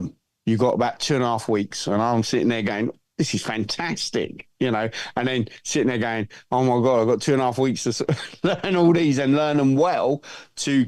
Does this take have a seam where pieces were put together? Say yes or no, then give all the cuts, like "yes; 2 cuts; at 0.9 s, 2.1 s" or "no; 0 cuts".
no; 0 cuts